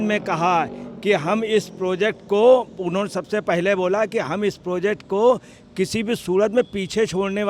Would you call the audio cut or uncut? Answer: uncut